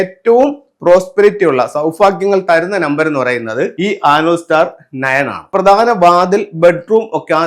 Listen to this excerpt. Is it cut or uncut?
cut